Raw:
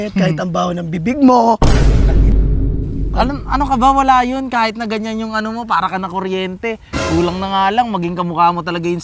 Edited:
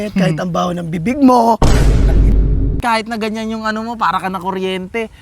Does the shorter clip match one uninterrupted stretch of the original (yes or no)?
no